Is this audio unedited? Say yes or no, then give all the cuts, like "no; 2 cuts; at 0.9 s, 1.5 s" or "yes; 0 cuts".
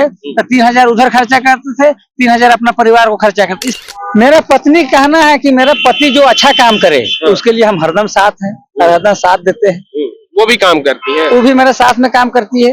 no; 1 cut; at 3.6 s